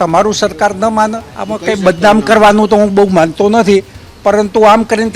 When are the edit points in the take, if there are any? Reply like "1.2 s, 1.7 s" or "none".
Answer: 1.3 s